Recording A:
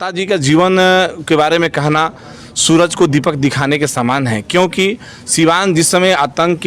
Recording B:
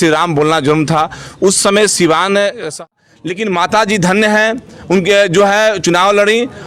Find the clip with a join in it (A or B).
B